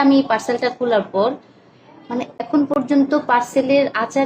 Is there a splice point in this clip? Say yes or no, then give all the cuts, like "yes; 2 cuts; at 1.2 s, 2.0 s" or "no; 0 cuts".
yes; 1 cut; at 2.7 s